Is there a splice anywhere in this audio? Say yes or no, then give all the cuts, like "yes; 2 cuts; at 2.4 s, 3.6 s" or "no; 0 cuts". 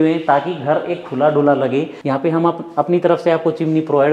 yes; 1 cut; at 1.9 s